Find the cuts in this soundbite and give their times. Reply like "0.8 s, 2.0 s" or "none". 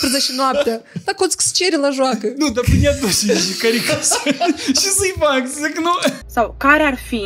6.2 s